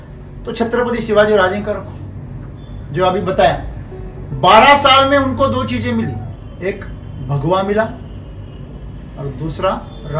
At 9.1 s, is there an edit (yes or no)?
no